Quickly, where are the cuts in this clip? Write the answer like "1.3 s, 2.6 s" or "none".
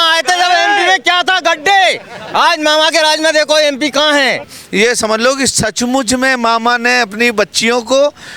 4.4 s